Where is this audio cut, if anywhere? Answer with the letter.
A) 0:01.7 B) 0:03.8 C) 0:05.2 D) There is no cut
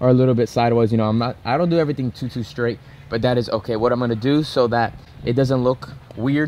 D